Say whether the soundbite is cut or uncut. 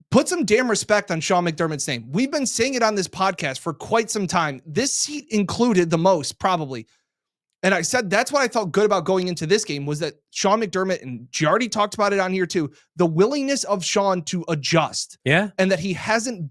uncut